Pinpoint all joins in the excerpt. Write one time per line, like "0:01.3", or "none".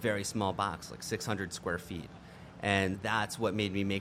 0:03.0